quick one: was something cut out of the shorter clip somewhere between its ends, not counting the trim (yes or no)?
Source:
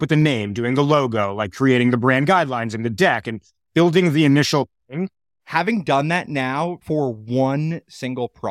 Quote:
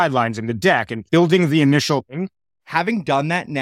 yes